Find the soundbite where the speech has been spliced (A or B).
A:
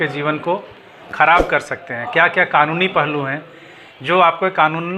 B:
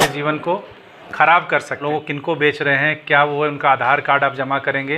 B